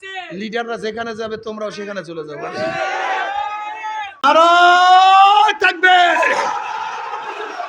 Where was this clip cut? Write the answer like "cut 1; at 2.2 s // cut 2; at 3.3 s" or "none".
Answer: cut 1; at 4.1 s